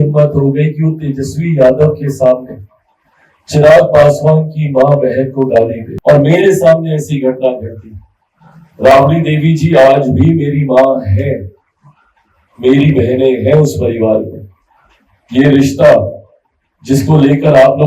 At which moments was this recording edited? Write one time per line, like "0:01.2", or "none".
0:05.9

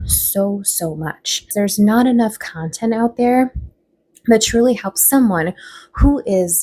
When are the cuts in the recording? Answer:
0:01.5

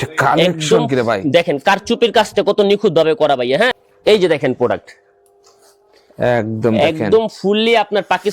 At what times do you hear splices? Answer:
0:03.9

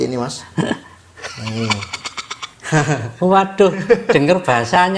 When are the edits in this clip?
none

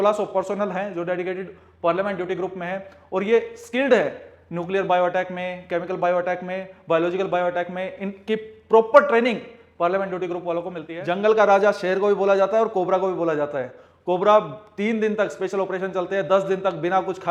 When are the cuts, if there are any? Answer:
0:10.8

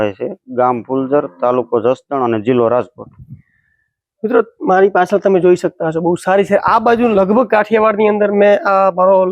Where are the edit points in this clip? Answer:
none

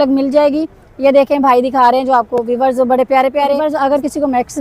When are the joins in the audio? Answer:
0:03.6

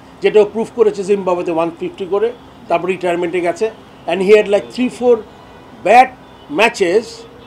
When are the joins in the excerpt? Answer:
0:03.9

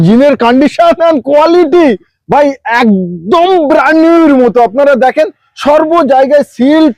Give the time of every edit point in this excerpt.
none

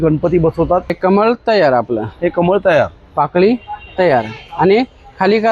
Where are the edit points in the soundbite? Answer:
0:01.0

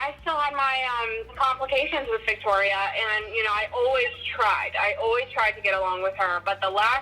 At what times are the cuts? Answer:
0:01.3

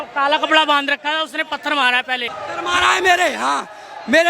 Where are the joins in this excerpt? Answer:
0:02.4

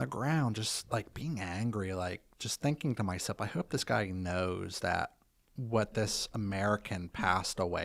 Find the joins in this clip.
none

